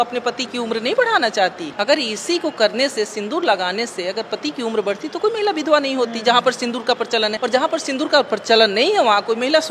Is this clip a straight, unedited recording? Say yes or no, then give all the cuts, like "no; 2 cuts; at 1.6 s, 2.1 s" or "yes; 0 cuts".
no; 2 cuts; at 1.7 s, 7.4 s